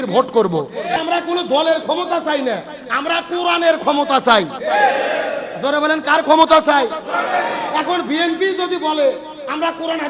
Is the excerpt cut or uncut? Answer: cut